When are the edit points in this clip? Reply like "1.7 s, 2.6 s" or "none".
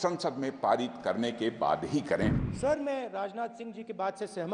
2.5 s

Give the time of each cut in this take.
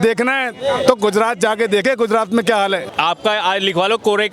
2.9 s

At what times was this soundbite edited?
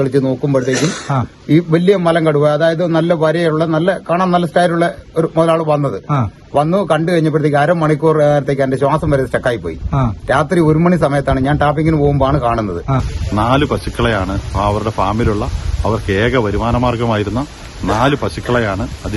13.1 s

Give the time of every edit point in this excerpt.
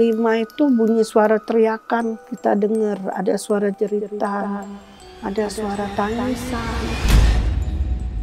2.3 s, 7.0 s

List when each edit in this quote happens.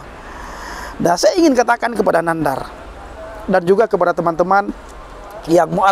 none

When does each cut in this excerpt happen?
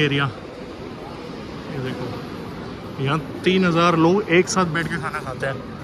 none

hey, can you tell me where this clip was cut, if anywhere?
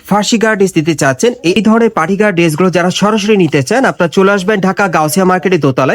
1.6 s

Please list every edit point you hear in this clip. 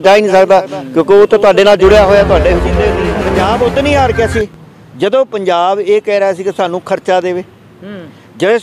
2.8 s

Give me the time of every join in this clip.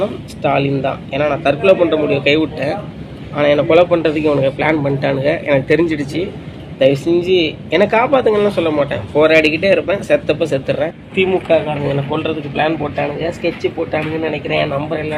11.0 s

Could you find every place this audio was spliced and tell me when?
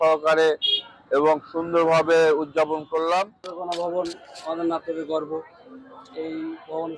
3.3 s

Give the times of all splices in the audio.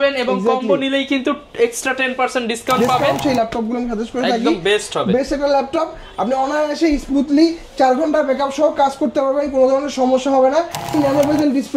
3.2 s, 10.9 s

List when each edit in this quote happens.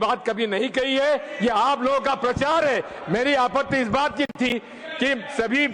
none

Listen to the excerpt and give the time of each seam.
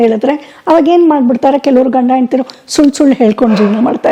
none

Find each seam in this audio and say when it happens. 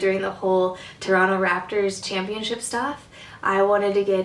2.0 s

